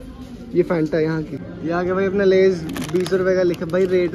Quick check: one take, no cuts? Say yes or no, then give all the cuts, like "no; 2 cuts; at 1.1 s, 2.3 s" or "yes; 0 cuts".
no; 1 cut; at 1.4 s